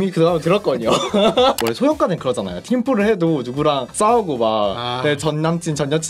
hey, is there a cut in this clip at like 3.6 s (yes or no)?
no